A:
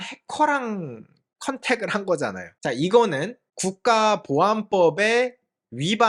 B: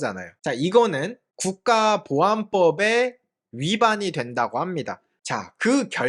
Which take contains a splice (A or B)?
B